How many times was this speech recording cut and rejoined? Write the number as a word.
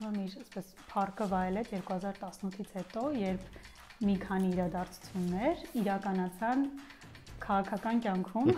zero